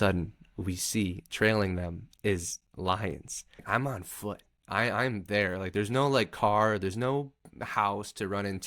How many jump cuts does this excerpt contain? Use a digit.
1